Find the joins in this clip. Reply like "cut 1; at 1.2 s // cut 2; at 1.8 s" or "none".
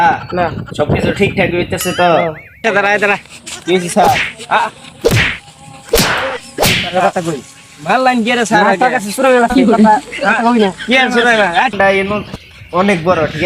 cut 1; at 2.6 s // cut 2; at 11.7 s